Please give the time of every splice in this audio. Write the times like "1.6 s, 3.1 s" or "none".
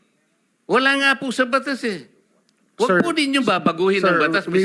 none